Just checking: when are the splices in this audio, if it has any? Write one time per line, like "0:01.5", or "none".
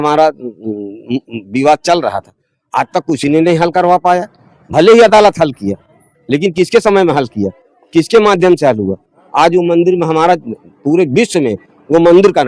none